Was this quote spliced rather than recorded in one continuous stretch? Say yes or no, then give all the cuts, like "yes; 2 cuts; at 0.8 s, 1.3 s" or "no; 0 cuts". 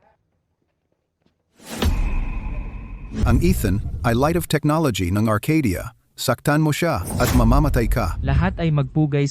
yes; 1 cut; at 3.2 s